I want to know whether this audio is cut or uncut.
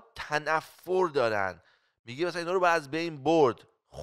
uncut